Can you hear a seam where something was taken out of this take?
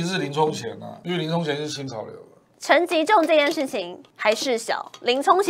yes; 3 cuts; at 0.9 s, 2.5 s, 4.0 s

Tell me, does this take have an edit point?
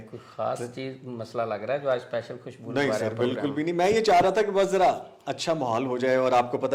no; 0 cuts

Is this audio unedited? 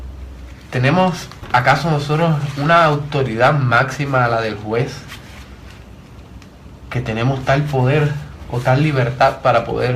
no; 1 cut; at 7.0 s

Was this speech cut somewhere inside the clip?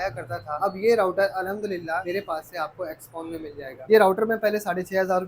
yes; 2 cuts; at 2.0 s, 3.8 s

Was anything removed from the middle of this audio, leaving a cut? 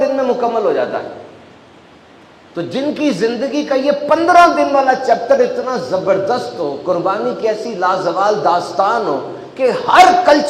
no; 0 cuts

